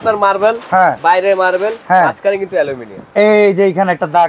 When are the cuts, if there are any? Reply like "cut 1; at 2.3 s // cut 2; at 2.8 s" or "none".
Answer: none